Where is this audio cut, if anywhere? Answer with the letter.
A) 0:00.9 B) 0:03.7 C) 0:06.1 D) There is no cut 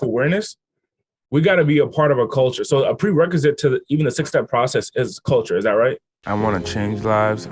C